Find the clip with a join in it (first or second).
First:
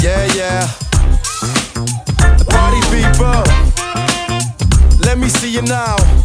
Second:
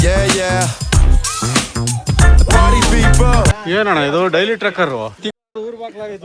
second